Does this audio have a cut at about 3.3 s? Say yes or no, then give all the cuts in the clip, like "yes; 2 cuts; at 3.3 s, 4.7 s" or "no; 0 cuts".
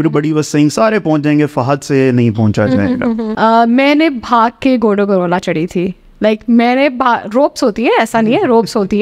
yes; 1 cut; at 3.3 s